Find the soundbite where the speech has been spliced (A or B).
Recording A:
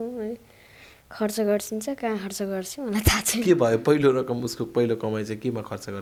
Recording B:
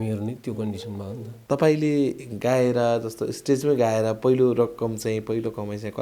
B